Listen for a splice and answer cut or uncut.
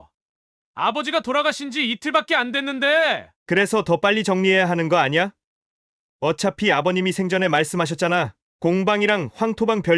uncut